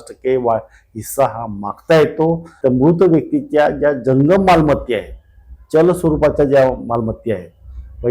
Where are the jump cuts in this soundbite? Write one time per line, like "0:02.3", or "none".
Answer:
0:02.5